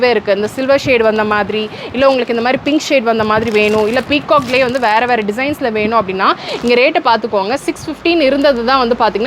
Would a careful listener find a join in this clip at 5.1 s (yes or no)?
no